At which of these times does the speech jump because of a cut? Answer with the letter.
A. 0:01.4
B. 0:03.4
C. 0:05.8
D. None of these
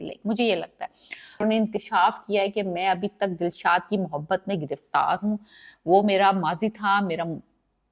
A